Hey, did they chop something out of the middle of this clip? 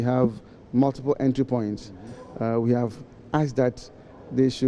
no; 0 cuts

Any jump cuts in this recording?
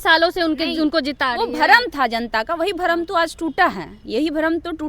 no; 0 cuts

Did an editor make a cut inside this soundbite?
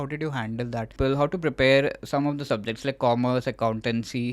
yes; 1 cut; at 0.9 s

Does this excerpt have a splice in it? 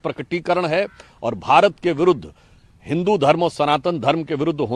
no; 0 cuts

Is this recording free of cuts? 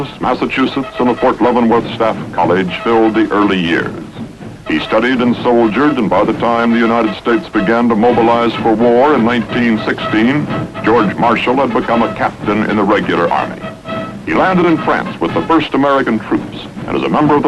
yes; 0 cuts

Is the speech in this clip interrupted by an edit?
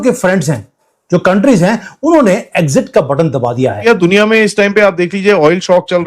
yes; 1 cut; at 3.8 s

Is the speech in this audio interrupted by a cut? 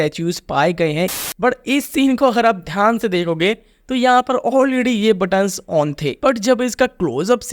yes; 1 cut; at 1.2 s

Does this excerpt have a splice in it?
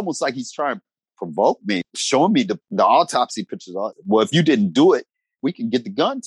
yes; 5 cuts; at 1.0 s, 1.8 s, 2.6 s, 3.9 s, 5.4 s

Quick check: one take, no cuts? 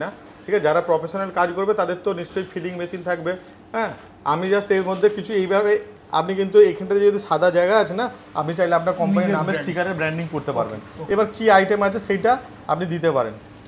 yes; 0 cuts

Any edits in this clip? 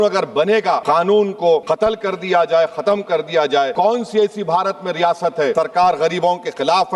yes; 4 cuts; at 0.8 s, 1.6 s, 3.7 s, 5.5 s

